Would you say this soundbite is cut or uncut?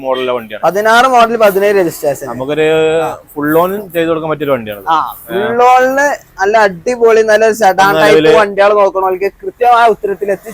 uncut